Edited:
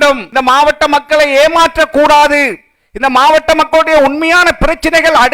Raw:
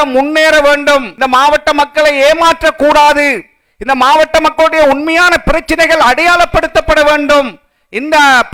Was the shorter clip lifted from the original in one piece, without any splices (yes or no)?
yes